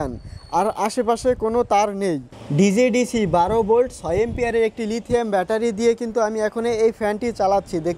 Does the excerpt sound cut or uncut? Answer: cut